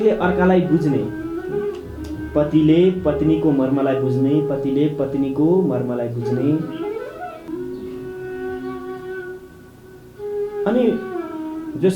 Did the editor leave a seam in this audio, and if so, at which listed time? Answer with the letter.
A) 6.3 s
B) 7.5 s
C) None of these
B